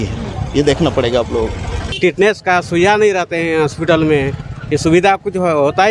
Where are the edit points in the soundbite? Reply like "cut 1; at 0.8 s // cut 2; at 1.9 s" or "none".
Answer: cut 1; at 1.9 s